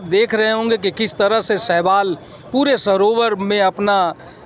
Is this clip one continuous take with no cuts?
yes; 0 cuts

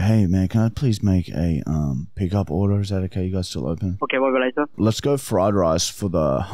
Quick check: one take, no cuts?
no; 2 cuts; at 4.0 s, 4.8 s

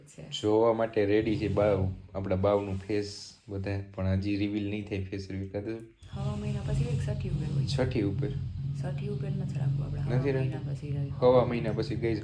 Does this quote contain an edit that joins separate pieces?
no; 0 cuts

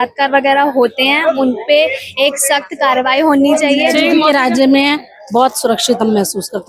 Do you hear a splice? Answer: yes; 1 cut; at 3.9 s

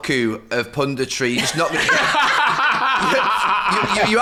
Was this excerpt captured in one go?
yes; 0 cuts

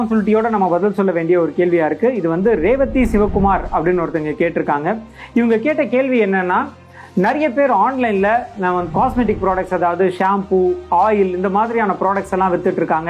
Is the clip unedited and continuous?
yes; 0 cuts

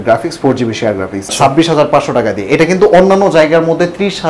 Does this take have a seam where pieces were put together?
yes; 1 cut; at 1.3 s

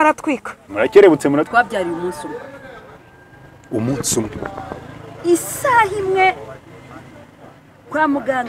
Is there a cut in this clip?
yes; 1 cut; at 1.5 s

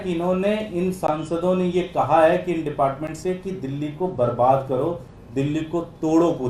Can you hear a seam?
no; 0 cuts

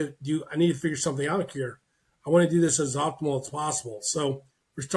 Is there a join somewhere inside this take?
no; 0 cuts

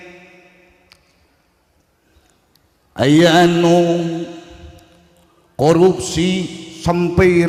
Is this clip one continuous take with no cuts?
yes; 0 cuts

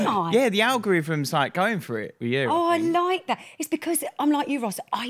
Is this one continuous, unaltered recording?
yes; 0 cuts

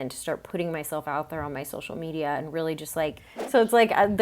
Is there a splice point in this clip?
yes; 1 cut; at 3.3 s

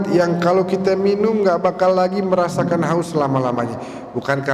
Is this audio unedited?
yes; 0 cuts

